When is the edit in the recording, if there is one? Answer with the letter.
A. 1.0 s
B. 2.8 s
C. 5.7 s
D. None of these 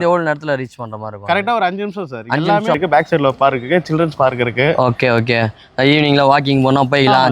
B